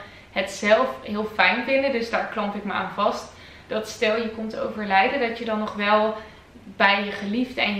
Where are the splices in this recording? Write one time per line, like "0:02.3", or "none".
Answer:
none

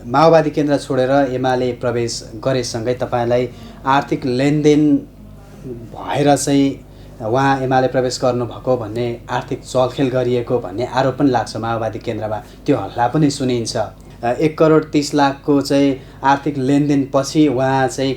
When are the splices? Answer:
0:14.0

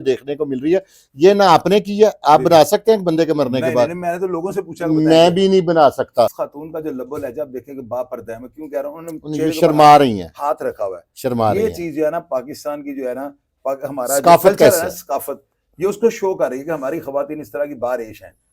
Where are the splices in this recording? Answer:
0:06.4

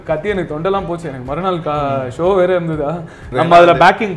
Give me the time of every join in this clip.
0:03.3

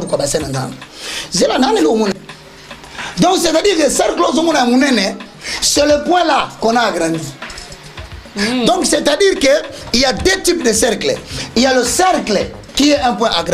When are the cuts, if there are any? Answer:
0:02.1

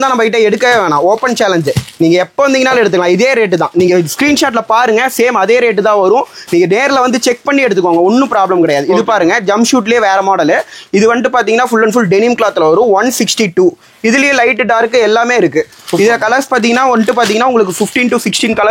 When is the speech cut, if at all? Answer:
none

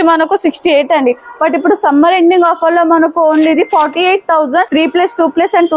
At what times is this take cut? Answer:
0:04.7

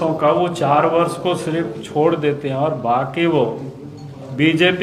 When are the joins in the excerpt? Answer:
none

